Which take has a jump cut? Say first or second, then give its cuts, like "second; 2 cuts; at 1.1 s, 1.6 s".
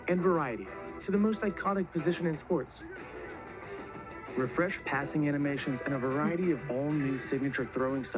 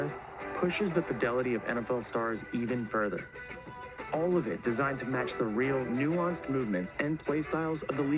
first; 2 cuts; at 5.9 s, 7.2 s